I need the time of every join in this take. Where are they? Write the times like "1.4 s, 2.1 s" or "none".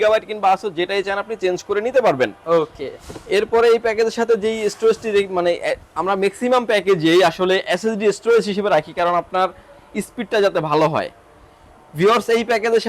none

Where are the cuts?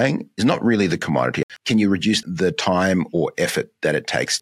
1.4 s

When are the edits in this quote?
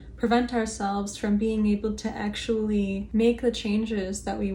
3.0 s

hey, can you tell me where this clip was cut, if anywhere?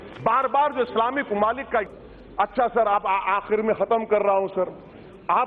1.9 s

